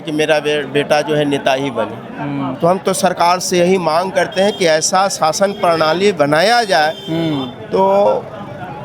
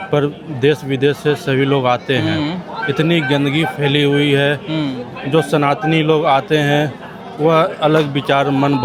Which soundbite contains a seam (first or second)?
first